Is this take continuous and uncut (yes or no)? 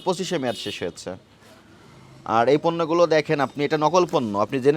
yes